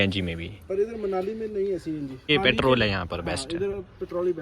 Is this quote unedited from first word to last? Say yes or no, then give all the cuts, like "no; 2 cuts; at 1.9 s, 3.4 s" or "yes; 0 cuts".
no; 1 cut; at 2.3 s